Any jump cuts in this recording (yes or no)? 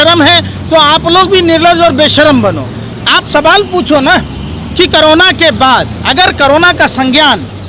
no